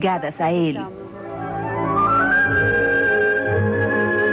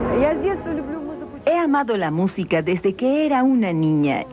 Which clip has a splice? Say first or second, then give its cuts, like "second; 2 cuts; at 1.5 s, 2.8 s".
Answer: second; 1 cut; at 1.2 s